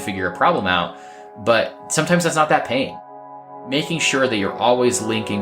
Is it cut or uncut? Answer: cut